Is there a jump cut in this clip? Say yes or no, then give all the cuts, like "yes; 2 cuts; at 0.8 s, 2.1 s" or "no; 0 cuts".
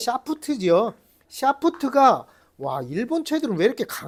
no; 0 cuts